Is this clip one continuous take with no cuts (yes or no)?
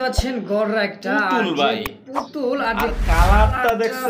yes